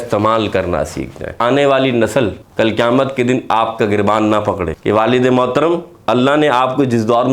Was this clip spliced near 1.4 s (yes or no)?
yes